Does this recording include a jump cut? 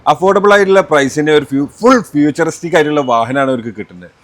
no; 0 cuts

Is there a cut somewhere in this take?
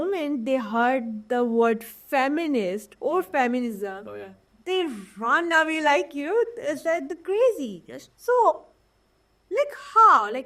no; 0 cuts

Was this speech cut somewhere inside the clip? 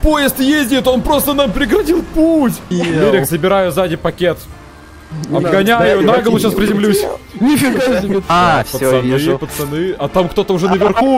yes; 2 cuts; at 2.7 s, 8.3 s

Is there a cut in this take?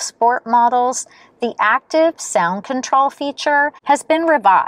no; 0 cuts

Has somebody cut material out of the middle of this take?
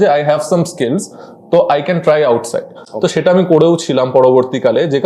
no; 0 cuts

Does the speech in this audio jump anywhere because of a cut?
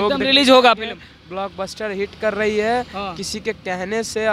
no; 0 cuts

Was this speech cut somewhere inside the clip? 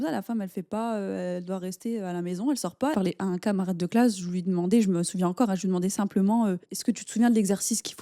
yes; 2 cuts; at 2.9 s, 6.7 s

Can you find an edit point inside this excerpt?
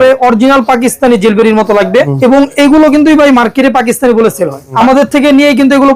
yes; 2 cuts; at 2.1 s, 4.7 s

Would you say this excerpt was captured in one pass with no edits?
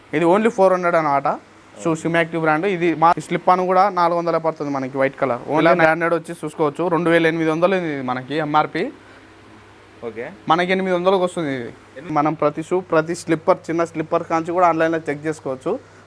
no; 3 cuts; at 3.2 s, 5.6 s, 12.1 s

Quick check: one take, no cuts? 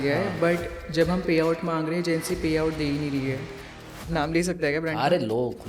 no; 1 cut; at 3.9 s

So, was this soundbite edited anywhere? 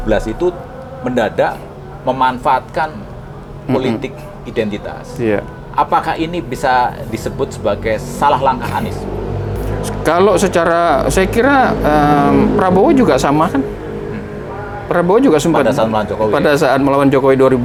no; 0 cuts

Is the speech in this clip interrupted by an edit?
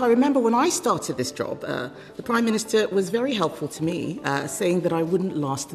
no; 0 cuts

